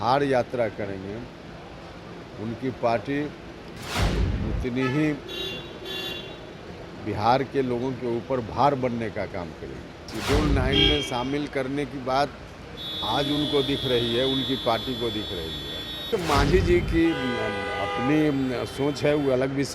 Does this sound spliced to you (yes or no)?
yes